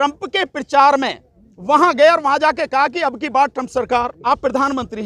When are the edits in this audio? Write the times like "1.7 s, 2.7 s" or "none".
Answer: 4.2 s